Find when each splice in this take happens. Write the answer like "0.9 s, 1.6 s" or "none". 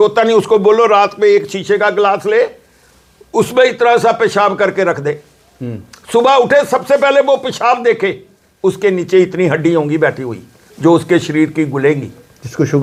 none